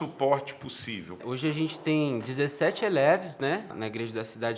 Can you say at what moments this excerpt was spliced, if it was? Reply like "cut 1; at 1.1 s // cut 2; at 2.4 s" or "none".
cut 1; at 1.2 s // cut 2; at 3.7 s